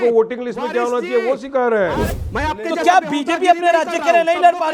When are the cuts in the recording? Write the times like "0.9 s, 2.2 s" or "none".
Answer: 2.1 s

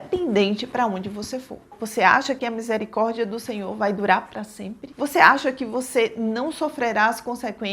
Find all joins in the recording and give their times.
1.6 s

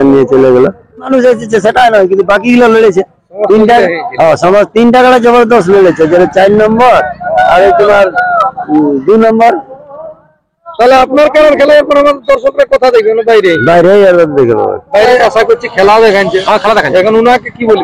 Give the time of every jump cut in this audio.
1.1 s, 15.1 s

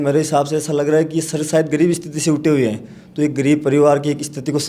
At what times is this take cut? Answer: none

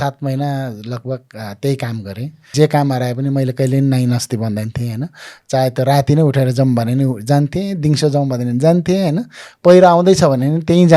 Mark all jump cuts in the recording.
2.5 s

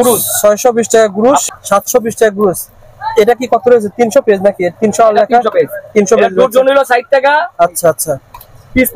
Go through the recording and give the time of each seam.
1.4 s

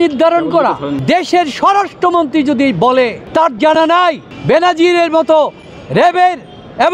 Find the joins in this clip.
0.9 s, 3.2 s, 4.3 s

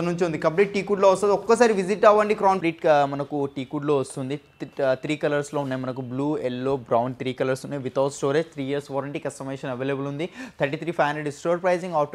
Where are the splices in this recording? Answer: 2.6 s

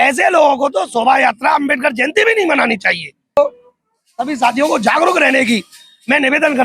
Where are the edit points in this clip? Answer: 3.4 s

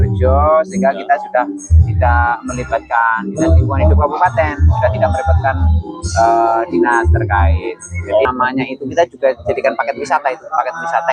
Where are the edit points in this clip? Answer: 8.2 s

